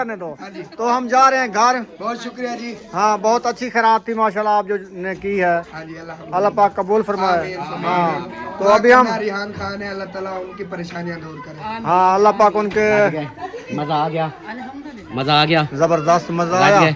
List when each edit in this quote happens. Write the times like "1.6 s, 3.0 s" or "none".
none